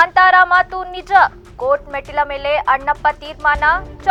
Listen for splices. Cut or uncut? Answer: uncut